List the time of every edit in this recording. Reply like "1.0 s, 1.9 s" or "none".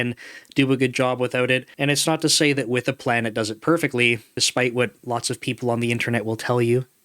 1.7 s, 4.3 s

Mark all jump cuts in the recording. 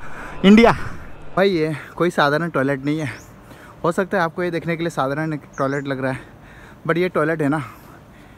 1.2 s

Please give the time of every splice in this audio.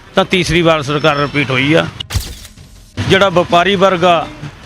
2.3 s

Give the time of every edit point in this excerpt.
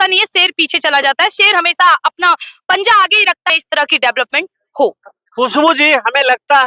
3.5 s

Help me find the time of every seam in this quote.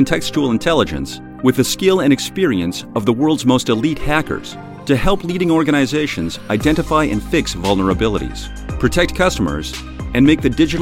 none

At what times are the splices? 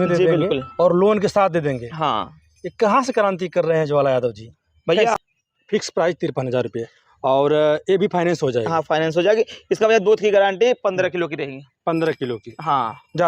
5.0 s

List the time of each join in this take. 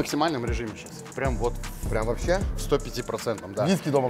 none

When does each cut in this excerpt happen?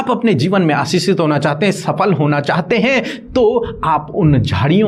none

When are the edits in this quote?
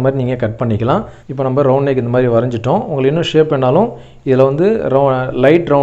1.2 s

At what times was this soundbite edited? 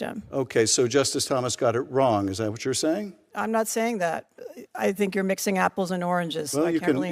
4.3 s

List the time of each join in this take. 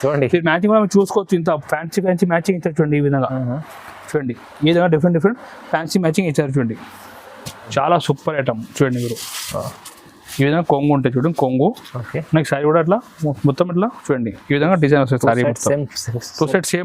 7.7 s

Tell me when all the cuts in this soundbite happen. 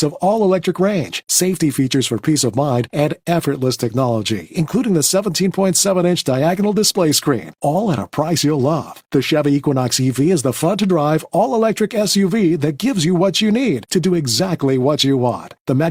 none

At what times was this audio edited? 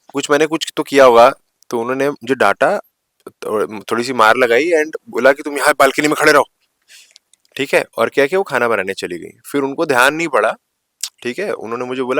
none

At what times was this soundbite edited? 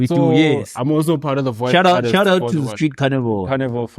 none

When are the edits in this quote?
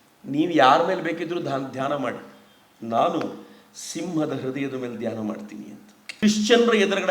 6.1 s

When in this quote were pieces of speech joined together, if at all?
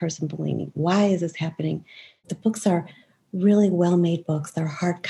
2.3 s

